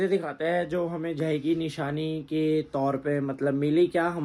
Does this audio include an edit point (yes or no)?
no